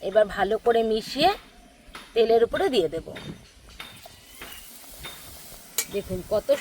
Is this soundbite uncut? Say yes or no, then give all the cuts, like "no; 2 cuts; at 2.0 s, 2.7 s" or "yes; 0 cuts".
no; 1 cut; at 5.6 s